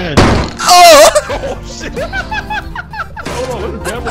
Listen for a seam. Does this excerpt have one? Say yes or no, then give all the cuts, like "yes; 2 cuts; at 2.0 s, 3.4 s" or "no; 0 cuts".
no; 0 cuts